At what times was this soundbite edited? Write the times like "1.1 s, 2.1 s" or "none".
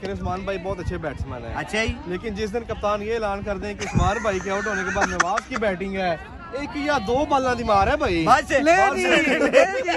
none

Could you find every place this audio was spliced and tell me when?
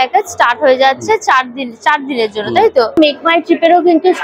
none

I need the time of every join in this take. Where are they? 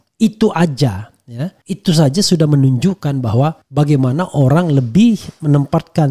3.6 s

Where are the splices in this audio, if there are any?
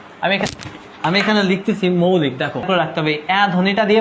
2.6 s

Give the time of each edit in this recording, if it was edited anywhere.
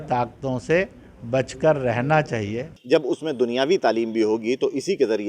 2.7 s

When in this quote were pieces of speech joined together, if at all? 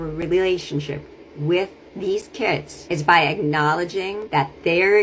2.7 s, 4.2 s

